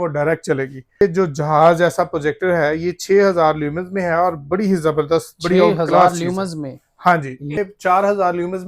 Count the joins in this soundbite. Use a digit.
2